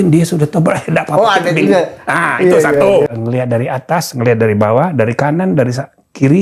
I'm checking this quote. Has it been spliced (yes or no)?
yes